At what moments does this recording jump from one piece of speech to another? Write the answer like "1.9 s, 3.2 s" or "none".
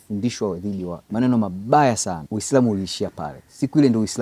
1.0 s, 2.2 s